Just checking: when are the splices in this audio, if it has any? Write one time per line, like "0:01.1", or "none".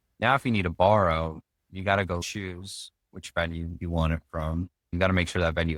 0:02.2
0:04.9